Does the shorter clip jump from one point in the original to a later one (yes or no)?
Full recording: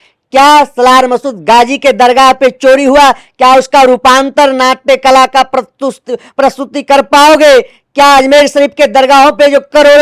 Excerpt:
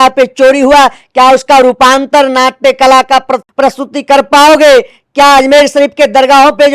yes